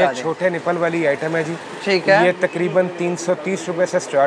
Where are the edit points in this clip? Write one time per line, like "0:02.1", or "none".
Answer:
none